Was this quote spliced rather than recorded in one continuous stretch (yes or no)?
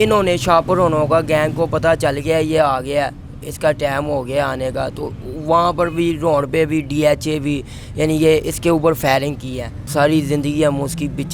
yes